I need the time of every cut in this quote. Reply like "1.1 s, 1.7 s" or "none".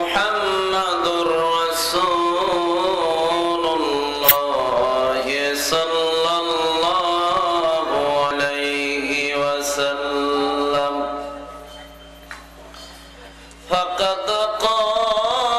4.3 s, 8.3 s